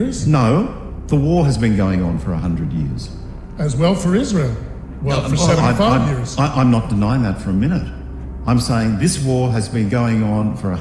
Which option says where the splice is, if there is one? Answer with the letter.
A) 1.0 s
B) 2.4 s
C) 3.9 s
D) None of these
D